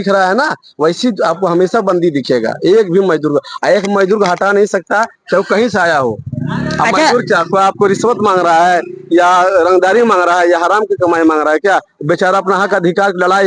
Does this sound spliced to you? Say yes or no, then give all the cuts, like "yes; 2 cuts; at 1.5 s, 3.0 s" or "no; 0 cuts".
no; 0 cuts